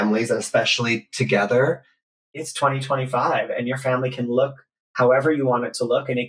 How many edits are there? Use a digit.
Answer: 1